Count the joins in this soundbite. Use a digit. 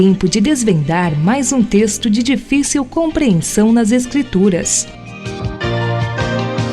1